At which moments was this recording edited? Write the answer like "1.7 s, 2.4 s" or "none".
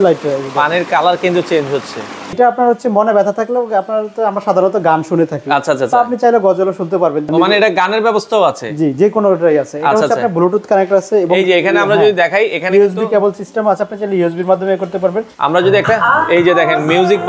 2.3 s, 7.3 s, 15.3 s